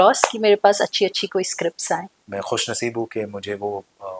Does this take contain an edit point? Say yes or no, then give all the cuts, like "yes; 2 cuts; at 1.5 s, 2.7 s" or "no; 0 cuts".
yes; 1 cut; at 2.2 s